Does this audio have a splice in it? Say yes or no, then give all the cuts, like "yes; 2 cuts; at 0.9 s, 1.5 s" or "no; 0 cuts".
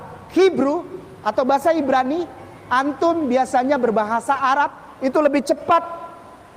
no; 0 cuts